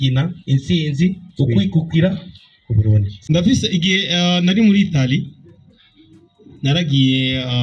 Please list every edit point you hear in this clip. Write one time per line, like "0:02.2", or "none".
0:03.1